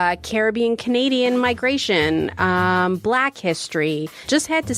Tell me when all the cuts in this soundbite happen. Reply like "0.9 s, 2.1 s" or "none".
none